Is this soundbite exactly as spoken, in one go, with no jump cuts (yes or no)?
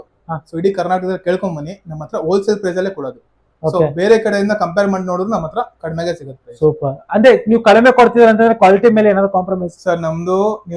yes